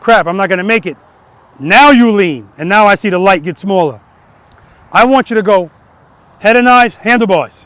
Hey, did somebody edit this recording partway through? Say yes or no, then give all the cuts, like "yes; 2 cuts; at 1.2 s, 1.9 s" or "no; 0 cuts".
no; 0 cuts